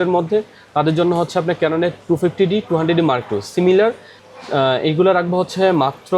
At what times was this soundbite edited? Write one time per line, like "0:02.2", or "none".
none